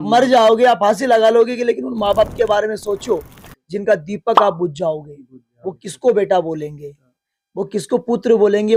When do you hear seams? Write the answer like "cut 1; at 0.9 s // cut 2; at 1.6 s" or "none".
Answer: none